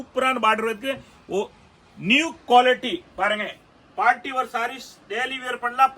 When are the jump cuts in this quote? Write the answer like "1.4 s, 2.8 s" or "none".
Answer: none